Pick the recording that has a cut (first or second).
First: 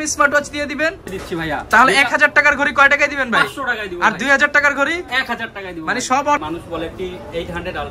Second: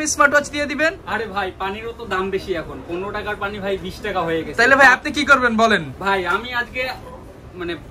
first